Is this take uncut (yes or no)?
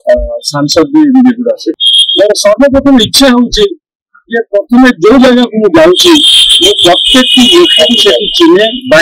no